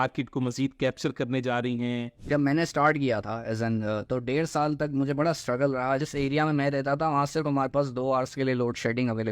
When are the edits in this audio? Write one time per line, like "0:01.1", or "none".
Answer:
0:02.2
0:06.1